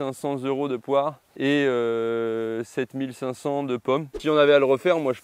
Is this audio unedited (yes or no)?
no